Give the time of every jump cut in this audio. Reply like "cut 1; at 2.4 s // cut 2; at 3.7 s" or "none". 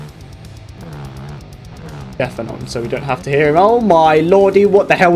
cut 1; at 2.2 s